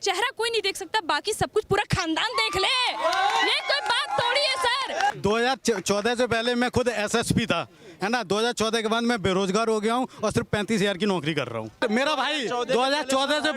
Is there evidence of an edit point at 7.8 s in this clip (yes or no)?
no